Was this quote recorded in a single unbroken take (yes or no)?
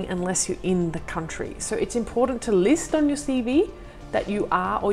yes